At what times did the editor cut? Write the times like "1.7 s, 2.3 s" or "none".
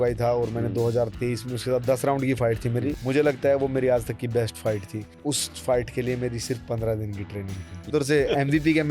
3.0 s, 5.1 s, 7.9 s